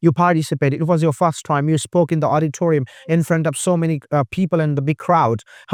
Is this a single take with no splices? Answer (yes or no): yes